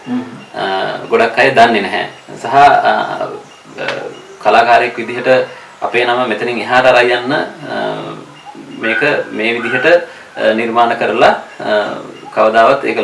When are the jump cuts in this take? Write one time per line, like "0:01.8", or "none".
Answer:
none